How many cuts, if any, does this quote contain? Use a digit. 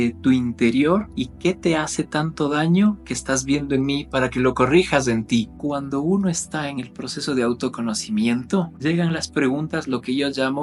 3